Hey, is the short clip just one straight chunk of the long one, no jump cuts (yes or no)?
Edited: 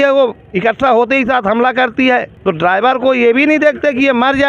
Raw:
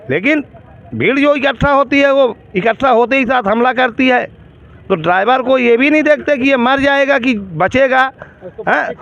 no